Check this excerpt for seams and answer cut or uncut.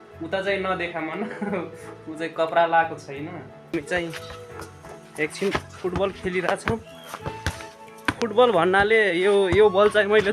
cut